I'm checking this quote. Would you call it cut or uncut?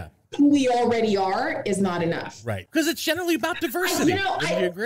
cut